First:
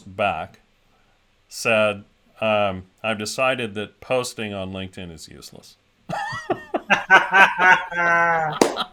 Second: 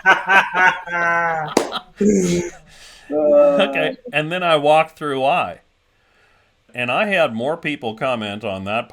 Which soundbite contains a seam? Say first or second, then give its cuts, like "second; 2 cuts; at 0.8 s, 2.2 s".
second; 1 cut; at 6.7 s